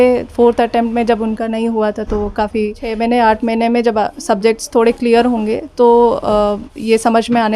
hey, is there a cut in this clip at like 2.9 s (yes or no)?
yes